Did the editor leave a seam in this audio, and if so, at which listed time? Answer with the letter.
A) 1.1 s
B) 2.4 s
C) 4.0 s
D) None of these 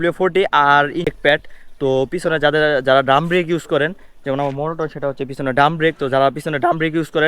A